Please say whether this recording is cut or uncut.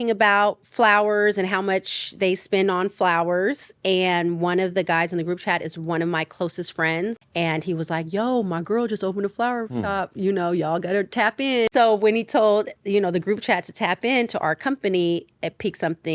cut